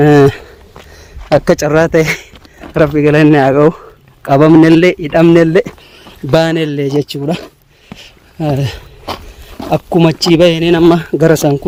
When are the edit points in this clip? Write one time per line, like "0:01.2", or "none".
none